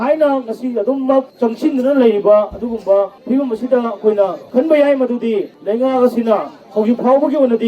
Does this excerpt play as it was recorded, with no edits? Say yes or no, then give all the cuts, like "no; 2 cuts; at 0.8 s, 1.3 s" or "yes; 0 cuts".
no; 4 cuts; at 1.3 s, 3.2 s, 4.4 s, 5.5 s